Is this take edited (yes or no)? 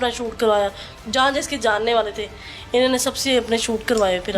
no